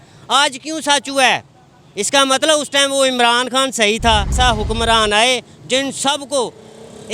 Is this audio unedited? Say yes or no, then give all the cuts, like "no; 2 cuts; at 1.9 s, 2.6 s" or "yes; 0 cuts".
no; 1 cut; at 4.3 s